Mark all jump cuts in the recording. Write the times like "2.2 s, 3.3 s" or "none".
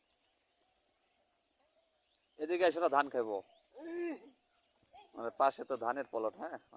none